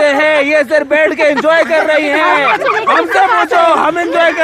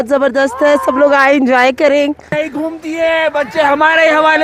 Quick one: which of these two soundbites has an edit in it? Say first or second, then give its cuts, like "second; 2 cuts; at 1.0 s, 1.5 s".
second; 1 cut; at 2.4 s